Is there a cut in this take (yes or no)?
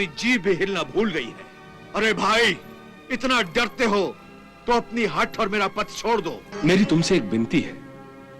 yes